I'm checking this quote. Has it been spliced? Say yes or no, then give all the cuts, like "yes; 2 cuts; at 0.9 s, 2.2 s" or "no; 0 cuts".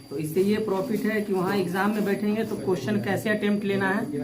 no; 0 cuts